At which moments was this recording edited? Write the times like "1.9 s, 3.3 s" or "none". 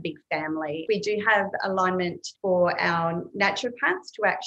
0.8 s, 2.3 s

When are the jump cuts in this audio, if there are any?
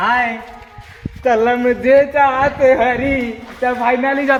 none

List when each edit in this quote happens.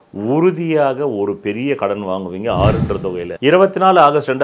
3.3 s

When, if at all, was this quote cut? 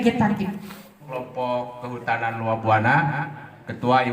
1.1 s

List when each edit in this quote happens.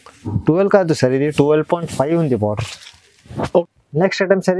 3.7 s

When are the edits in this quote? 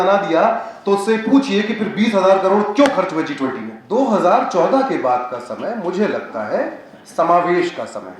3.7 s

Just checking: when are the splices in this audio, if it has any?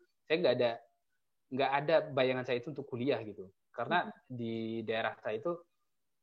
none

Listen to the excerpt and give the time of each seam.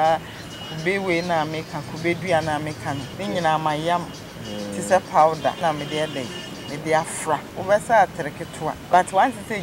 3.1 s, 5.6 s, 7.5 s, 8.7 s

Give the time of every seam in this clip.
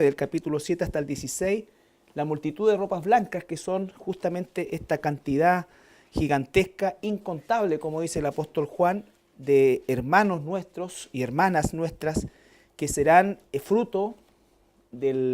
6.2 s

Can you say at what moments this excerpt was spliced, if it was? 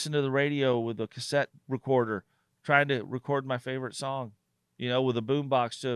1.6 s

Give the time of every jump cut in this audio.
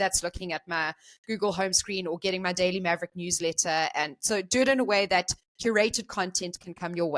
5.4 s

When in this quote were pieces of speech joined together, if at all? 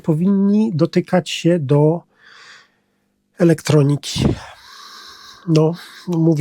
none

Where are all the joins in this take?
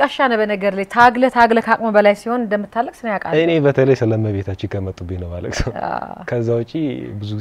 none

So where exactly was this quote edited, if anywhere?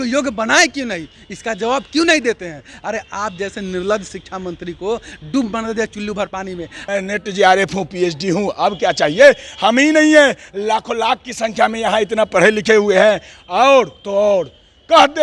6.7 s

